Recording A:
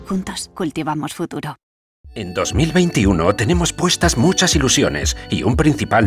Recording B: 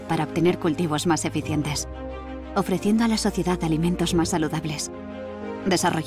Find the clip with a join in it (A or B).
A